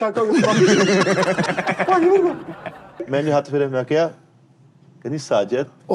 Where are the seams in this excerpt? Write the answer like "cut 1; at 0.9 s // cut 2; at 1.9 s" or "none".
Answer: cut 1; at 3.0 s